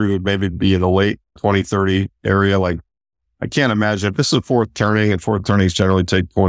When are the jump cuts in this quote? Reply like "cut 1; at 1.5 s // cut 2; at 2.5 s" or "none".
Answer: cut 1; at 1.3 s